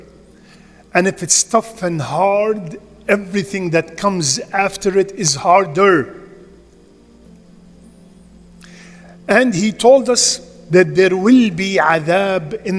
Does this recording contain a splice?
no; 0 cuts

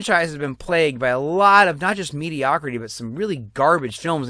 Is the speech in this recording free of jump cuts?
yes; 0 cuts

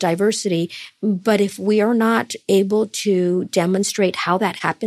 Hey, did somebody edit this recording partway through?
no; 0 cuts

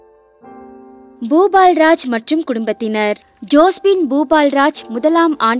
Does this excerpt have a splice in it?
yes; 1 cut; at 1.2 s

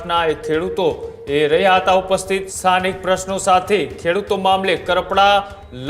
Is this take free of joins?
no; 1 cut; at 2.5 s

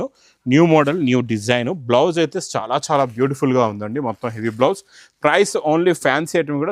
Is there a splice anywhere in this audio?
no; 0 cuts

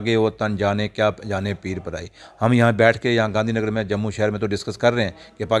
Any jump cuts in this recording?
no; 0 cuts

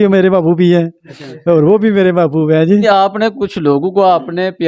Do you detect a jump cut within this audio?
yes; 1 cut; at 2.8 s

